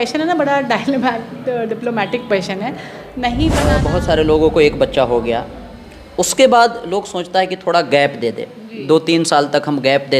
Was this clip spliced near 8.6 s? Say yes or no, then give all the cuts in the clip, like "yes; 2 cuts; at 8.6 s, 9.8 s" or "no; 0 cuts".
no; 1 cut; at 3.8 s